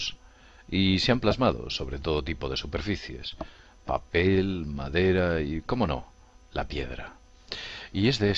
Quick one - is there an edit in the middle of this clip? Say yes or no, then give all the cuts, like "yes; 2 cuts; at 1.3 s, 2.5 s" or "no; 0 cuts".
yes; 1 cut; at 2.7 s